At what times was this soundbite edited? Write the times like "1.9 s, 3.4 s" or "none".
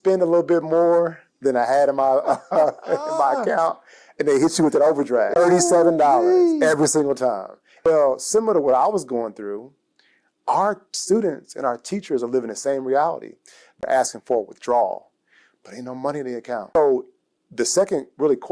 5.4 s, 7.9 s, 13.8 s, 16.8 s